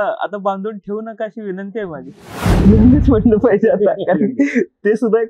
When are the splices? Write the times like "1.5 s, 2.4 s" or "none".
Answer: 2.7 s